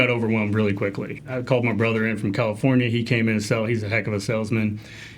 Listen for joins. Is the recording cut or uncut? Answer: cut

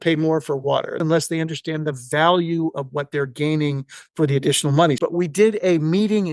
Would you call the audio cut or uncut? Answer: cut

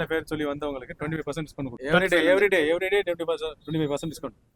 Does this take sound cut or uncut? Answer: cut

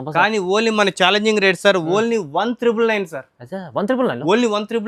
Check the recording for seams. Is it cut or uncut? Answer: uncut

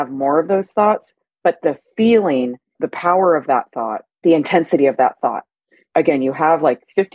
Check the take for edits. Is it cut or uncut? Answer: cut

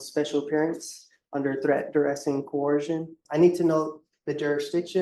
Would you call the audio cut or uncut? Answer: cut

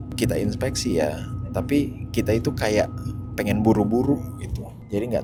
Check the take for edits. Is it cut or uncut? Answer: uncut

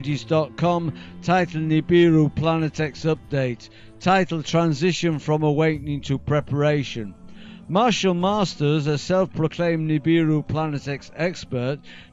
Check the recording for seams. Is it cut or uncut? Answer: cut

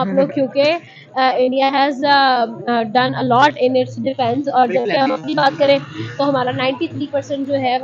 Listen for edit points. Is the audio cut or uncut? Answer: uncut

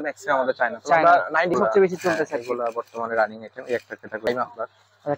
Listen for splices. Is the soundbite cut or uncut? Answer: cut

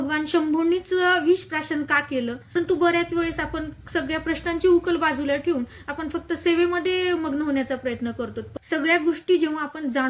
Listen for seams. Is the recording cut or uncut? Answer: cut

